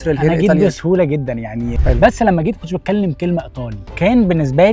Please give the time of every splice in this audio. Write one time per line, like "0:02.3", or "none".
0:01.8